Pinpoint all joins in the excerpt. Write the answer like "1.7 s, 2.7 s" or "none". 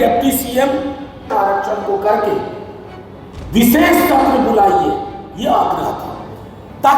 1.3 s